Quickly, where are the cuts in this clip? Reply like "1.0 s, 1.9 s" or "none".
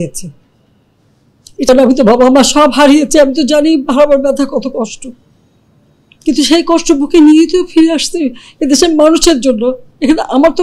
1.7 s